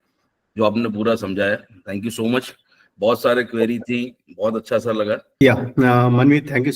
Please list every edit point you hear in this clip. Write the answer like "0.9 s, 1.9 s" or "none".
5.4 s

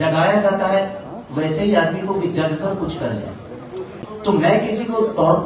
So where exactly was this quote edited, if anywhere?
none

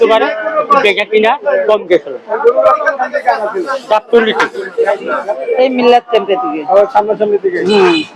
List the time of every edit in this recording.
5.4 s

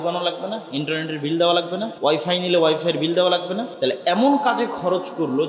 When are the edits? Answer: 1.9 s, 3.7 s

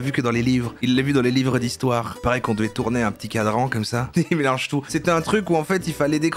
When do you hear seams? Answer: 4.1 s, 4.9 s

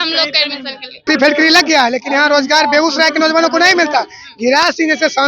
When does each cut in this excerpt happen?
1.0 s

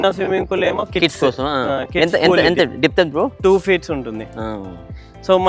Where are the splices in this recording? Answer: none

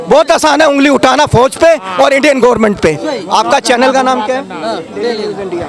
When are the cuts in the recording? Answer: none

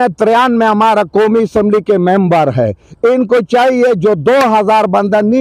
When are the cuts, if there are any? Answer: none

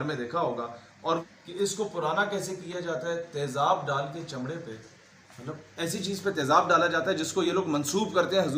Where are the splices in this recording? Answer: 1.5 s

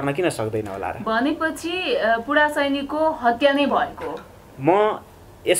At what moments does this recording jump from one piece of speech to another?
none

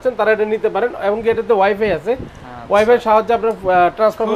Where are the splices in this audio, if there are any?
none

